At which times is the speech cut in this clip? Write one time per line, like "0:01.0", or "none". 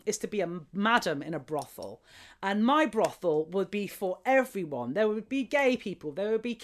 none